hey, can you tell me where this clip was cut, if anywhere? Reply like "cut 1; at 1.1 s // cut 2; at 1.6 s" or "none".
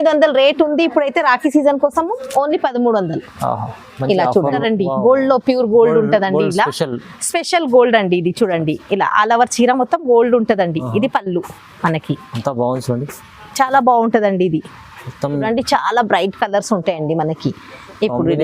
cut 1; at 4.6 s // cut 2; at 15.4 s